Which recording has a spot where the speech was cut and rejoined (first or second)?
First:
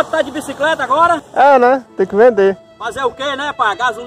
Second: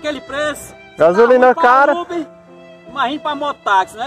first